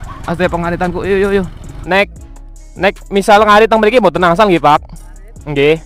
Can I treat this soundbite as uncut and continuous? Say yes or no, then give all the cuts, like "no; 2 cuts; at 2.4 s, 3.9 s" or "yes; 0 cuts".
no; 1 cut; at 1.7 s